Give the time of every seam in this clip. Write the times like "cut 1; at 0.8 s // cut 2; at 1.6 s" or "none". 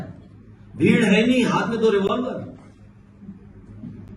none